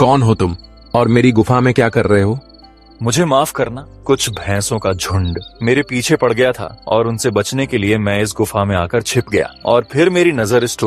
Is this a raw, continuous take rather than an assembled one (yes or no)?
no